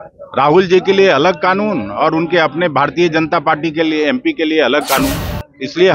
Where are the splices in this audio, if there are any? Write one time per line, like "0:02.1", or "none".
none